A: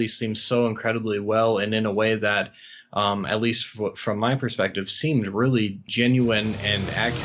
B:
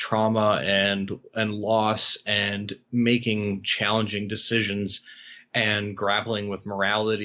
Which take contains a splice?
A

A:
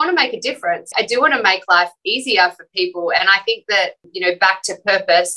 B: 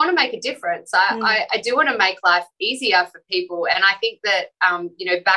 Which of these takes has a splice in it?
A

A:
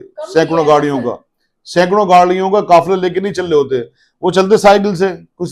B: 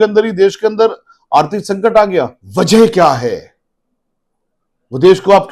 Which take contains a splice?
B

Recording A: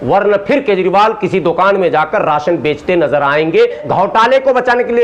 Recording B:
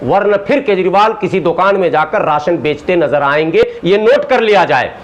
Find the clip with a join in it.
A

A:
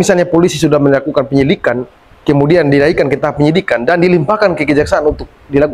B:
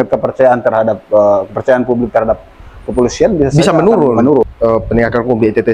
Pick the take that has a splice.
B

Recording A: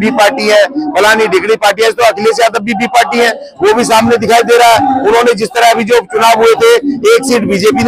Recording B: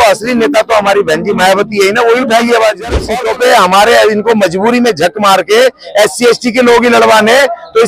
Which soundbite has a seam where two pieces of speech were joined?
B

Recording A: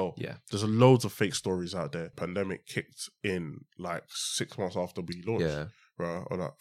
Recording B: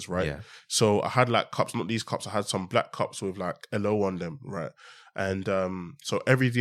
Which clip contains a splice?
A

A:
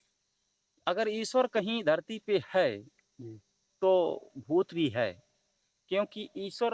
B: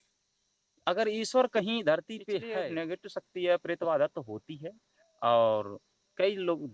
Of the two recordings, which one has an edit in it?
B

